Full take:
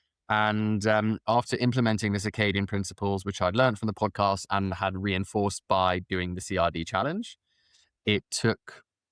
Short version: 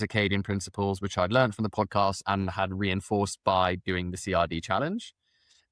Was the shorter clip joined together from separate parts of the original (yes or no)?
no